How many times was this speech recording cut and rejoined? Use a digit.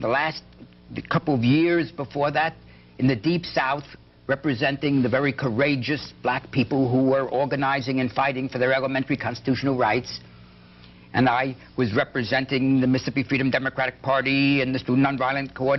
1